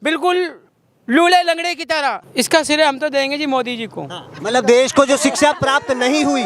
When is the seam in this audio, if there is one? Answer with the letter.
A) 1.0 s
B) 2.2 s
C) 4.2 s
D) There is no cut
B